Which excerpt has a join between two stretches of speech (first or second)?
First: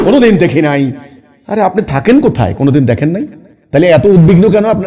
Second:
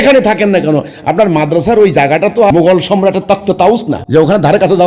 second